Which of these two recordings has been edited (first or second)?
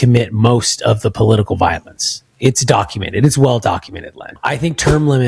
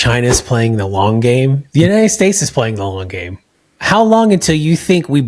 first